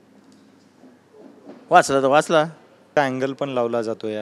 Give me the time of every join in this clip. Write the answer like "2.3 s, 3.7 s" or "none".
3.0 s